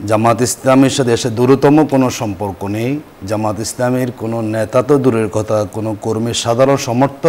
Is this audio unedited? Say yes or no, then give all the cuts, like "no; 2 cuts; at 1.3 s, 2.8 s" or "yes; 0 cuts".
yes; 0 cuts